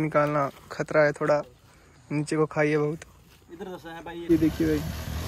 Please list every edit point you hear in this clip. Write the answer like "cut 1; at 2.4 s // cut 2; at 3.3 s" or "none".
cut 1; at 4.3 s